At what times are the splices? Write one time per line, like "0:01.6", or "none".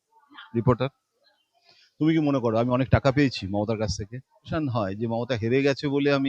0:04.4